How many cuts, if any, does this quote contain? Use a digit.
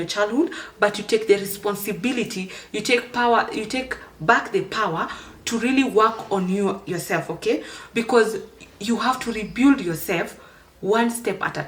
0